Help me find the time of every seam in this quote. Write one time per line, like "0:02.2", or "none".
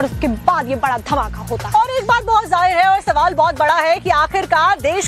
0:03.7